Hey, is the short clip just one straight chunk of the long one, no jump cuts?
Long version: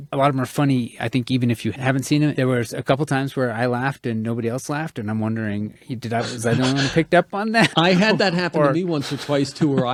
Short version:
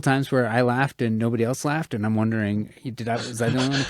yes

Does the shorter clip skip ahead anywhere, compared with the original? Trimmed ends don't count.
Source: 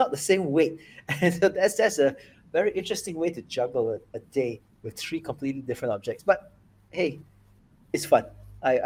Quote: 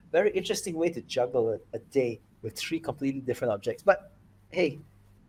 no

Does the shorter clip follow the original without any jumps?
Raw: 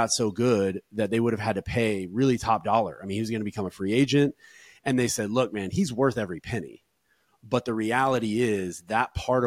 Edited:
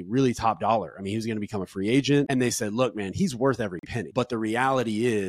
no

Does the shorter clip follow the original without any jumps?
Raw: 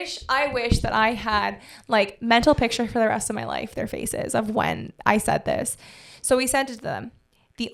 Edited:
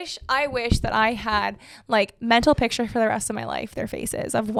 yes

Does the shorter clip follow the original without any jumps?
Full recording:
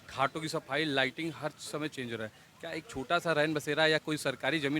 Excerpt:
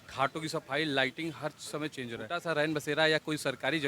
no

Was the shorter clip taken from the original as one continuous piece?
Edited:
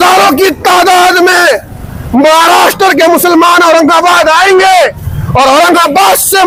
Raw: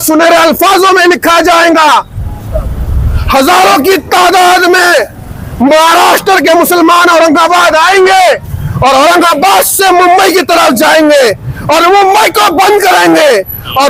yes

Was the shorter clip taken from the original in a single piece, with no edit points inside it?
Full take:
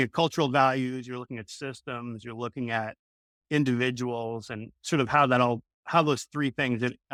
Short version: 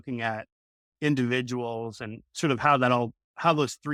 yes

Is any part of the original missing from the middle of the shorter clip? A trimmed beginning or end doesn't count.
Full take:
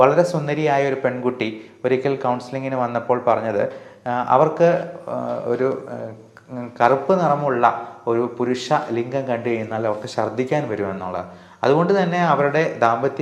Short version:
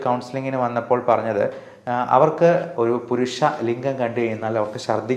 yes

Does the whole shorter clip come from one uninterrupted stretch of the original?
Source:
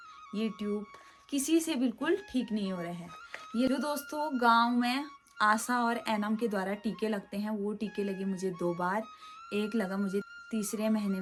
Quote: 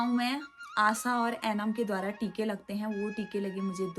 yes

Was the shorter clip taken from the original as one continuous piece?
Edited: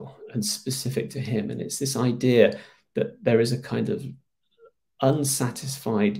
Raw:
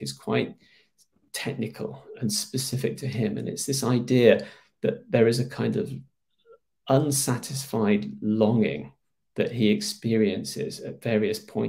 yes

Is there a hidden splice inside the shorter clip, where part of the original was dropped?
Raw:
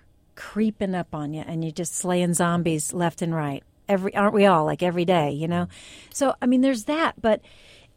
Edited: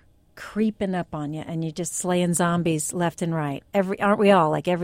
yes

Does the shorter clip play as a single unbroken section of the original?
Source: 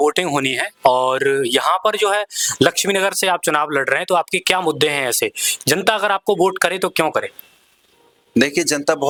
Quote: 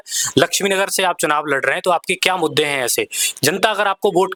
yes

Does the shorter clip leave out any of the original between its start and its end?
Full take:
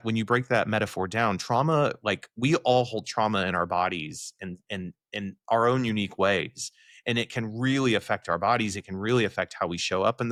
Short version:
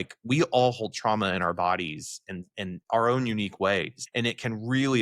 yes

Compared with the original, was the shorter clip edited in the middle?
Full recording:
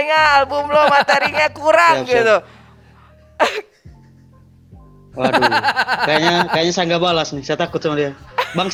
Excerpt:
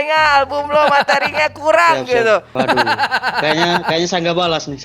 yes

